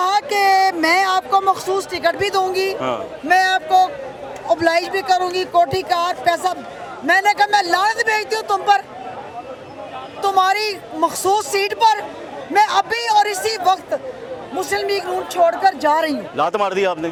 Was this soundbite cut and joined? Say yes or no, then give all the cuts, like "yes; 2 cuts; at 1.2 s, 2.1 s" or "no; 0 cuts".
no; 0 cuts